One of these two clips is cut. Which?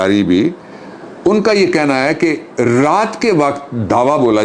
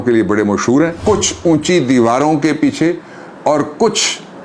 second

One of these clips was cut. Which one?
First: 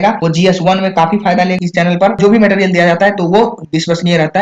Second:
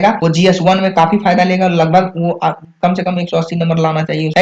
first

